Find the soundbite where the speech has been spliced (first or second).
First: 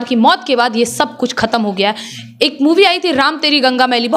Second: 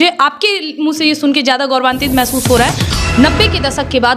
second